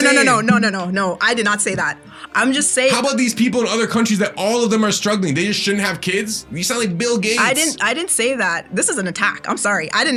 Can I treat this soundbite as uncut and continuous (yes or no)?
yes